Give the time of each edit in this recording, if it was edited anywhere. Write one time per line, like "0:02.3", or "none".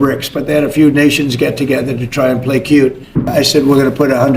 0:03.2

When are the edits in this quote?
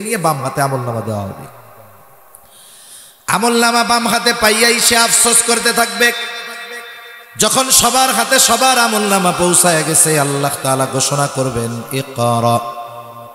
none

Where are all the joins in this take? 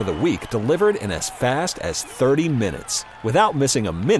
none

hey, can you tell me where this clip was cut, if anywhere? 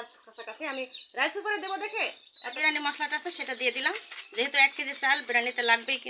0:02.6

